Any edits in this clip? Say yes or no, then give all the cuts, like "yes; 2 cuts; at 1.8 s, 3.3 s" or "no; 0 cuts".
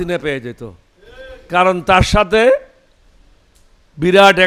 no; 0 cuts